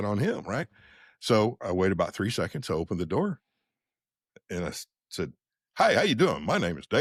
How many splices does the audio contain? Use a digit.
0